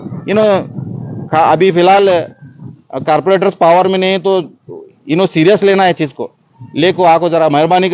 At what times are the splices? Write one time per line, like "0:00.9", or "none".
none